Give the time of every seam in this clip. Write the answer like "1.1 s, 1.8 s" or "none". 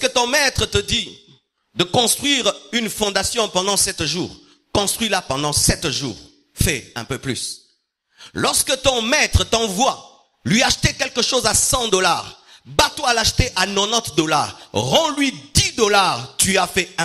none